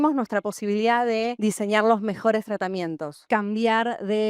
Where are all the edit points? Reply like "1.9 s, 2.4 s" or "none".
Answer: 1.3 s, 3.2 s